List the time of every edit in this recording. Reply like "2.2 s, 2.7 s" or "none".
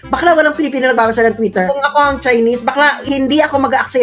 1.7 s, 3.0 s